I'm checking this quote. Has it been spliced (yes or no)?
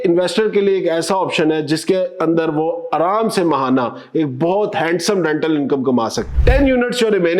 yes